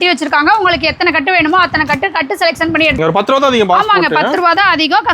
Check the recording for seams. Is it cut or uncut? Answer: cut